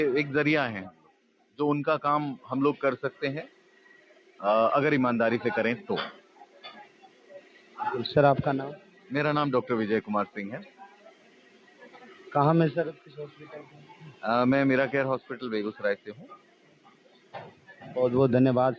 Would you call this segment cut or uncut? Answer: uncut